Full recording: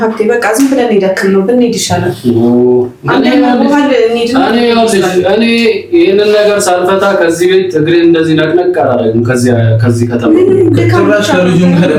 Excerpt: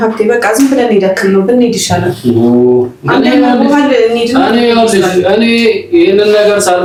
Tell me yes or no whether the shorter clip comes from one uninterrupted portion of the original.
yes